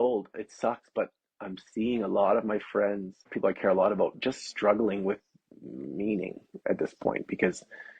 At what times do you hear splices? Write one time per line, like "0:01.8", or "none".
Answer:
0:03.3